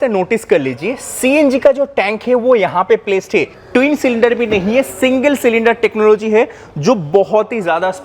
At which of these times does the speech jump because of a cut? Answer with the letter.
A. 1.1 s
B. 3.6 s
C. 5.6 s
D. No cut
B